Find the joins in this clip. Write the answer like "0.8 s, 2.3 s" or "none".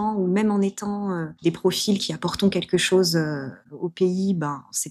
1.3 s, 3.6 s